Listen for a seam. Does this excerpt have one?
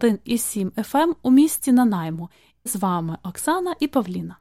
yes; 1 cut; at 2.7 s

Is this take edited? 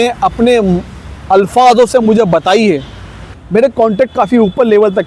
yes; 1 cut; at 3.3 s

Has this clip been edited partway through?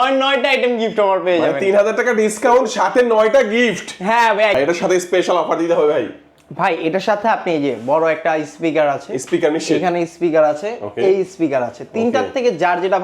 yes; 1 cut; at 4.6 s

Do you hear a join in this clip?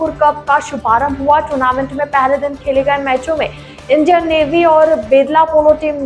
no; 0 cuts

